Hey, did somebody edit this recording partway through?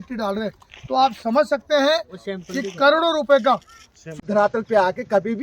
yes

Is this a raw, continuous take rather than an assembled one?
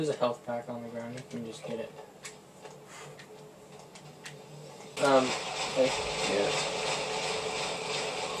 no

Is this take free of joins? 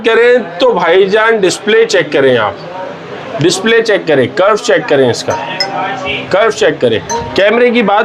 yes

